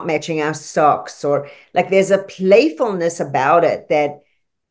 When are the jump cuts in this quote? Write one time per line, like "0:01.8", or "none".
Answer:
none